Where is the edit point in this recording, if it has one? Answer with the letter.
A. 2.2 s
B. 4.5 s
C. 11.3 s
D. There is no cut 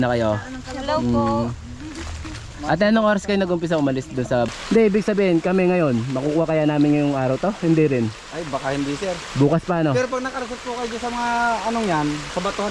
B